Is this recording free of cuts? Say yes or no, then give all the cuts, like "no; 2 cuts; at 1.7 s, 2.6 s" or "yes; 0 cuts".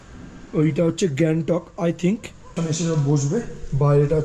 no; 1 cut; at 2.5 s